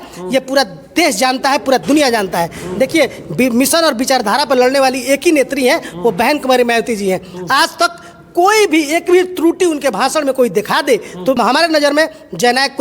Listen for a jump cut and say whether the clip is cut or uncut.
cut